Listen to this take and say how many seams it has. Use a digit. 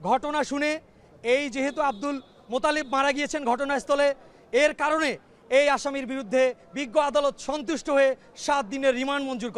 0